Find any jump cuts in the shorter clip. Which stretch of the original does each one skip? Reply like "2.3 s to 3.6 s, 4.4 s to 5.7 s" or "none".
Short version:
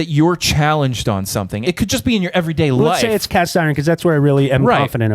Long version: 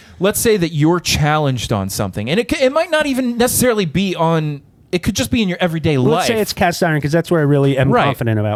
2.2 s to 4.8 s